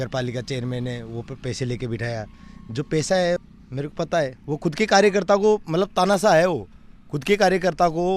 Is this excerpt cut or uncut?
cut